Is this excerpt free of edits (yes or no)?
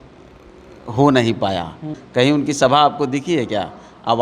no